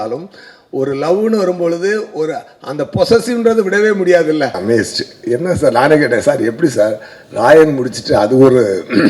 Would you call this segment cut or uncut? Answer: cut